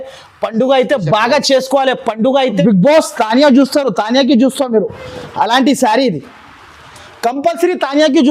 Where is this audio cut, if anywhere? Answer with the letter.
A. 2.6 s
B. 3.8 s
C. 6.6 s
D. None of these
A